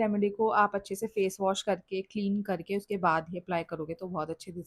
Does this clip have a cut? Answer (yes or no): no